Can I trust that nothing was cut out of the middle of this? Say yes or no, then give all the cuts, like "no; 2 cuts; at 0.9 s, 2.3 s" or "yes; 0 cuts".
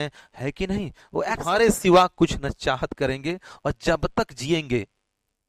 no; 1 cut; at 1.4 s